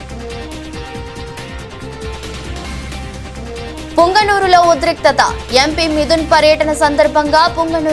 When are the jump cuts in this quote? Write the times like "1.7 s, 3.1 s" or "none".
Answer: 1.3 s